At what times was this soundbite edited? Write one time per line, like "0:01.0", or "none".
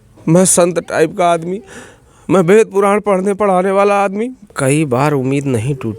0:04.5

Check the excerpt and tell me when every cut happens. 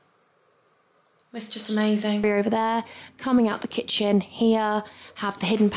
0:02.2

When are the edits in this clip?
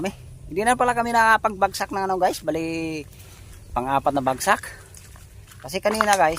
none

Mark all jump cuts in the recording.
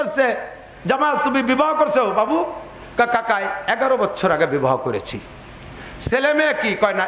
none

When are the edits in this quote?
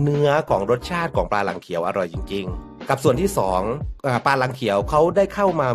0:02.7
0:03.9

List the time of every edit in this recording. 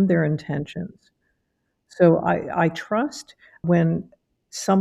0:03.6

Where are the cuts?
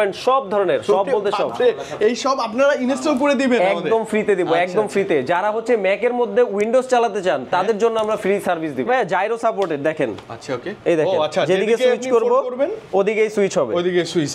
0:08.9

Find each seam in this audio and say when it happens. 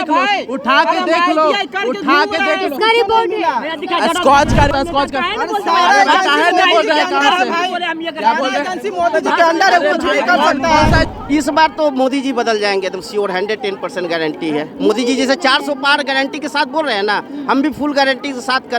0:04.7
0:11.1

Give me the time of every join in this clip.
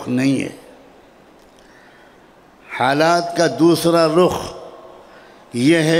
none

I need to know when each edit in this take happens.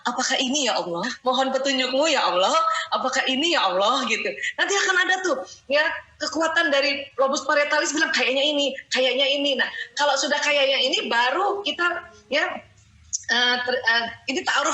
0:01.1

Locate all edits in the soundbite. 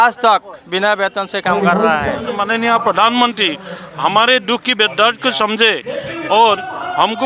0:02.3

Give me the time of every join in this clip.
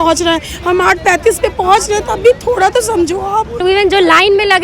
0:03.6

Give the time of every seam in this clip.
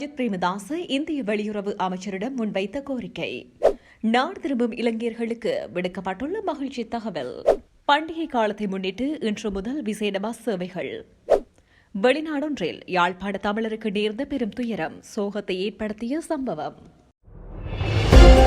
0:16.8

